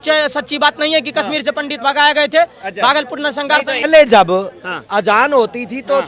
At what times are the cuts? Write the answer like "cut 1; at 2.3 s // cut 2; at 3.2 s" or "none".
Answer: cut 1; at 3.8 s